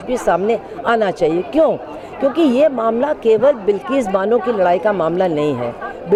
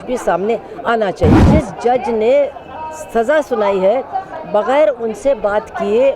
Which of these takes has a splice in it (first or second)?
second